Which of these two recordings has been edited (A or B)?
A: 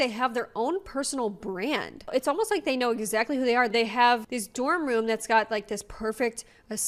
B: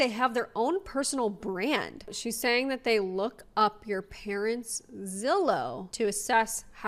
B